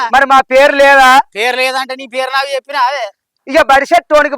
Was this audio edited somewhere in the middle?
yes; 1 cut; at 3.3 s

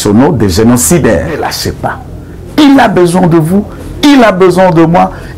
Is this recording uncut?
no; 1 cut; at 1.5 s

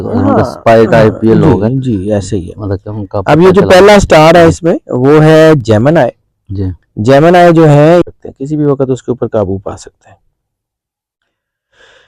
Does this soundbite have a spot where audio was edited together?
yes; 1 cut; at 8.1 s

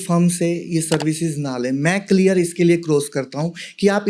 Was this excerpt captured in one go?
yes; 0 cuts

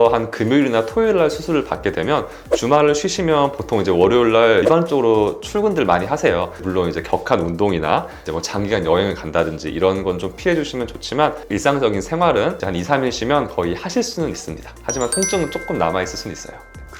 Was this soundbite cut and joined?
no; 0 cuts

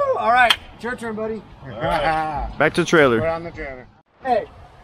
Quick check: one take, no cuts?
no; 1 cut; at 3.6 s

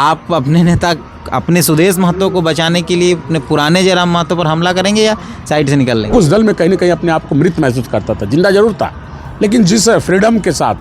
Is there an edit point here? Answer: yes; 1 cut; at 6.1 s

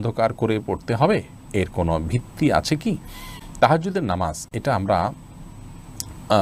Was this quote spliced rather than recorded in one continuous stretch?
no; 0 cuts

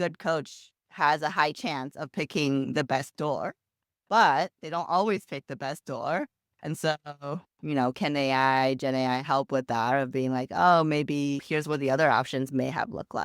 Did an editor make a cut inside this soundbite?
no; 0 cuts

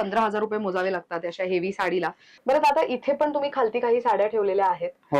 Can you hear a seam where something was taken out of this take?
yes; 1 cut; at 2.3 s

